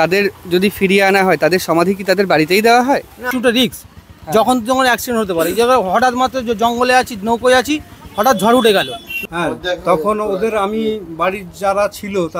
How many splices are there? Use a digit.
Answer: 2